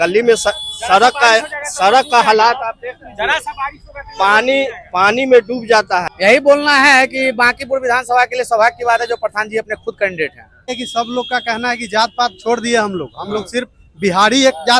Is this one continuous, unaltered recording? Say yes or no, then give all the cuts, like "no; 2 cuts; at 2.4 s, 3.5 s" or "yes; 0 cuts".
no; 2 cuts; at 6.1 s, 10.7 s